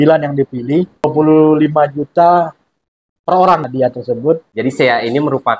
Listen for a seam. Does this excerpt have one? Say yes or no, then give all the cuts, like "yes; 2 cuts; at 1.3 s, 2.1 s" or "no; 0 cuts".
yes; 3 cuts; at 1.0 s, 3.6 s, 4.5 s